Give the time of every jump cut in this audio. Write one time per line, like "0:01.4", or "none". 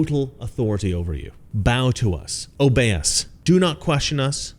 none